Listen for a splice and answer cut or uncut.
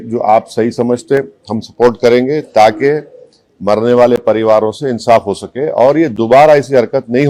uncut